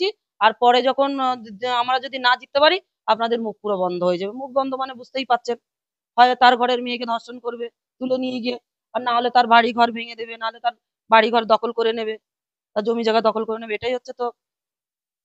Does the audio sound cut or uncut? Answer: uncut